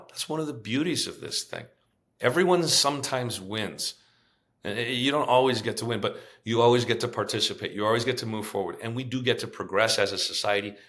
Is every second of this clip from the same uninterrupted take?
yes; 0 cuts

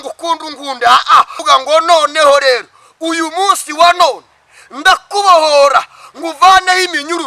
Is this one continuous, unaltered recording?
no; 1 cut; at 1.4 s

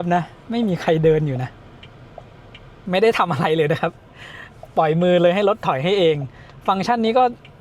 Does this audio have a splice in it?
yes; 1 cut; at 2.8 s

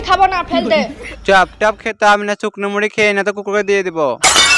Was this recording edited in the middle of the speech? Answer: yes; 1 cut; at 1.0 s

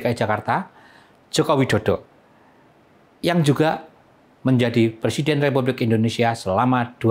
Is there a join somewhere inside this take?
no; 0 cuts

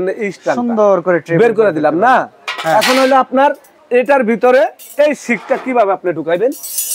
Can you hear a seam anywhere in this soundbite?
no; 0 cuts

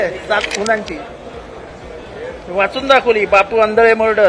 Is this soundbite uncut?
yes; 0 cuts

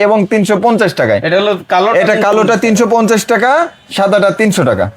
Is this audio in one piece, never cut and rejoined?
yes; 0 cuts

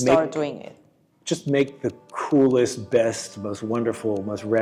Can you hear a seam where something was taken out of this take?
no; 0 cuts

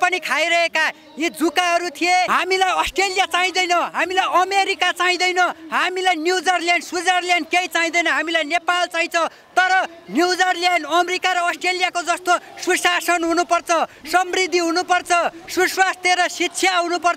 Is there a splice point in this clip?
yes; 1 cut; at 2.3 s

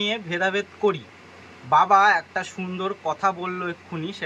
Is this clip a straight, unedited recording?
yes; 0 cuts

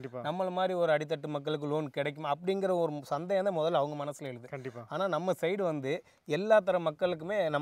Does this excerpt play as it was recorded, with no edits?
yes; 0 cuts

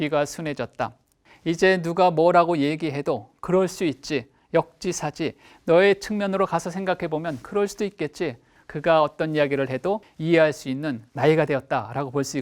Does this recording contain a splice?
yes; 4 cuts; at 1.3 s, 8.5 s, 10.1 s, 11.1 s

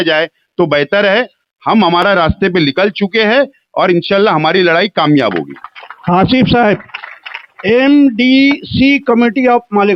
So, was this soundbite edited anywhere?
no; 0 cuts

